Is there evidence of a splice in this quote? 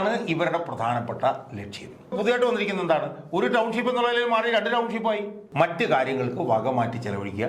yes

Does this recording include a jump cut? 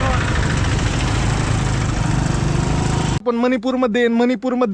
yes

